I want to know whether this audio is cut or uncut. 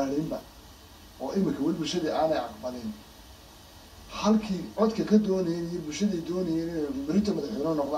uncut